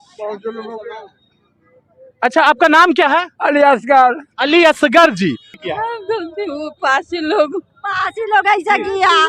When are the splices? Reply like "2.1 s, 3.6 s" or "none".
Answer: 5.8 s